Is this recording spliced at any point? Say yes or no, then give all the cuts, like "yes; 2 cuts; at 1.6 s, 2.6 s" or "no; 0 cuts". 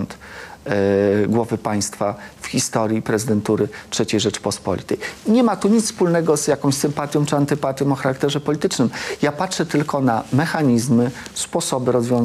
no; 0 cuts